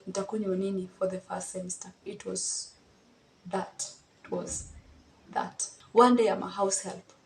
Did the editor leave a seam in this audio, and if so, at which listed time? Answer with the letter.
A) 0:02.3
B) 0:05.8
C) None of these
B